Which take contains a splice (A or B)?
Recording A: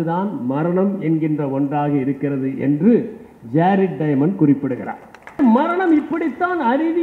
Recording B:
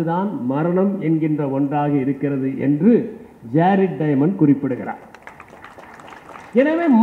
A